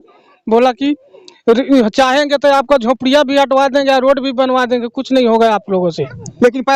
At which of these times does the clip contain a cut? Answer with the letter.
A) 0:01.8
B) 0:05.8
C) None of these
C